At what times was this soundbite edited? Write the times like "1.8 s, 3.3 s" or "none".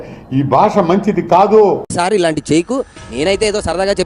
none